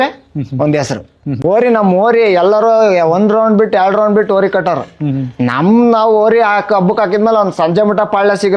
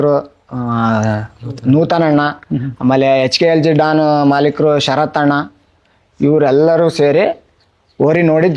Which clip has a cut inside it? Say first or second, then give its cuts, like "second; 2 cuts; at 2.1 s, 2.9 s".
first; 1 cut; at 1.4 s